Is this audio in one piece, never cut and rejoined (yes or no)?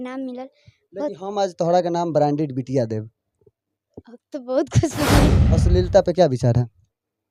no